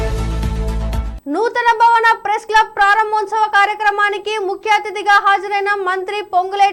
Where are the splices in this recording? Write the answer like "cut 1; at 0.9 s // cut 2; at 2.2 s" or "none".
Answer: cut 1; at 1.1 s